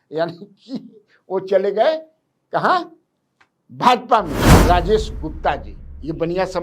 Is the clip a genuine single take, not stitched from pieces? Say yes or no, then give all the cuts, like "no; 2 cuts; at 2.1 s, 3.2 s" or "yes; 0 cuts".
no; 1 cut; at 4.5 s